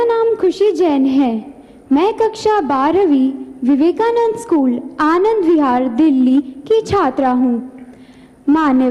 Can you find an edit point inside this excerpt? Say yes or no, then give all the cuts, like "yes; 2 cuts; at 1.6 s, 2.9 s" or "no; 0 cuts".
no; 0 cuts